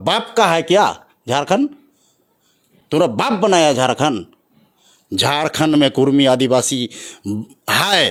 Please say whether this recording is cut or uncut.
uncut